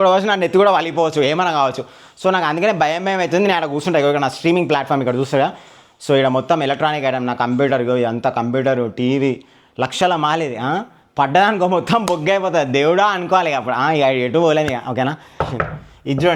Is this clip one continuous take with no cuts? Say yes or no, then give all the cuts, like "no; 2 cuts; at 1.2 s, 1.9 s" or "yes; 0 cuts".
no; 1 cut; at 15.3 s